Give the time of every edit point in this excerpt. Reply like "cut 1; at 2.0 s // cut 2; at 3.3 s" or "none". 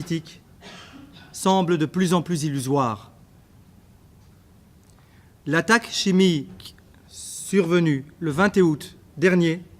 cut 1; at 5.0 s